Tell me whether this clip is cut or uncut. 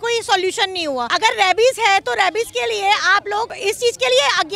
cut